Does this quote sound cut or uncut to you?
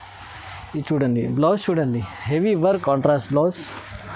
cut